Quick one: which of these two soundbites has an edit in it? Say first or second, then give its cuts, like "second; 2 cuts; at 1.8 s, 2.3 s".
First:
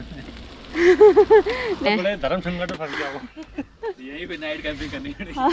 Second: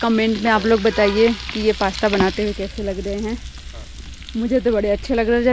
first; 1 cut; at 1.8 s